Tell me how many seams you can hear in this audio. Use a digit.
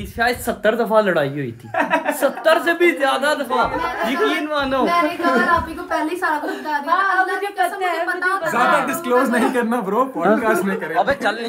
0